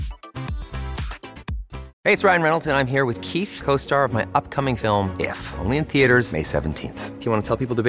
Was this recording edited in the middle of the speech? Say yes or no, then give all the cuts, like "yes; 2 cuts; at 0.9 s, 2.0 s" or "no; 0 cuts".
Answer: yes; 1 cut; at 1.9 s